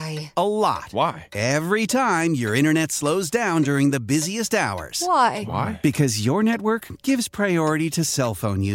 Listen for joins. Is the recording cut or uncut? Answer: uncut